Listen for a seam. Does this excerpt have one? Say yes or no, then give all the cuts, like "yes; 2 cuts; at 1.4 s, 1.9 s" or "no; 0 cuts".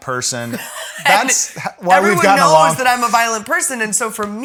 no; 0 cuts